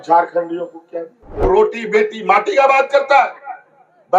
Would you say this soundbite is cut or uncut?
cut